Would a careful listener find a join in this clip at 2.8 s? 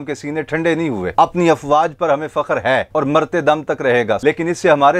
no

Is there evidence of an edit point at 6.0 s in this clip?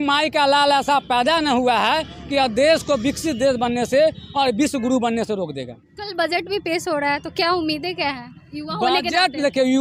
no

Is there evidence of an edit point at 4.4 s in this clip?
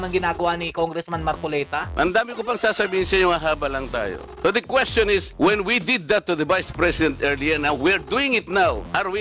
no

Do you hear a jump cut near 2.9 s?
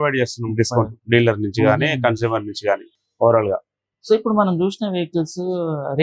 no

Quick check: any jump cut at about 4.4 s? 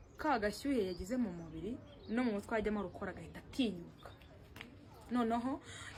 no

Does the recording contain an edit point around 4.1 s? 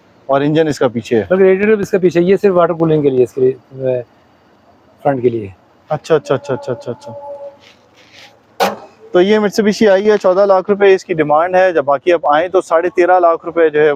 no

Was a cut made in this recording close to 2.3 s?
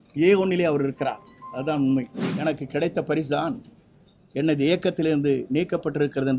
yes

